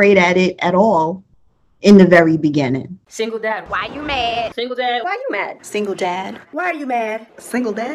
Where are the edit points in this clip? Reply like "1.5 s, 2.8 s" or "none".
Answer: 2.9 s